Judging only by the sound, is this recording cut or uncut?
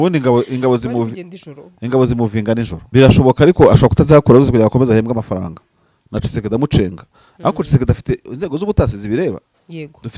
cut